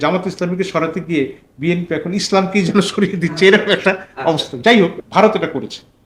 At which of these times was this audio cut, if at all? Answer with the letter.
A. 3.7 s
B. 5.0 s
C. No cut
B